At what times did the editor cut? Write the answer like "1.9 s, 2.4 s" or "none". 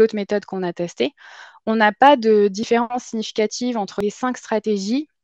3.9 s